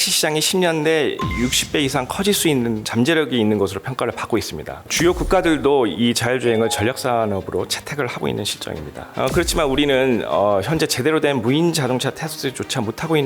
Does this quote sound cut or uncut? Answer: cut